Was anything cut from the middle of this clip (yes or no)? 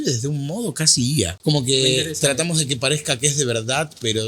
yes